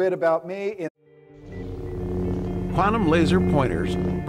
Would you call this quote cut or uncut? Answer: uncut